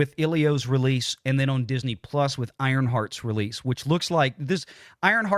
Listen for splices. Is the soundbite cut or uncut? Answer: uncut